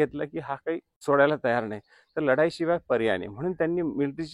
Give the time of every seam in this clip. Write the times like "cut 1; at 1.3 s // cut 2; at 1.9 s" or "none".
cut 1; at 0.9 s